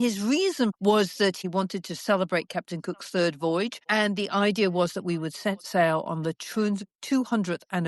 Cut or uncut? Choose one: cut